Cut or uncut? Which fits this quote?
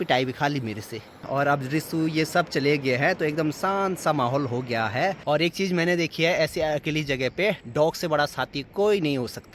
cut